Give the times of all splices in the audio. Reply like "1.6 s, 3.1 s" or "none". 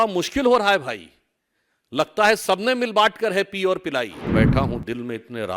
4.3 s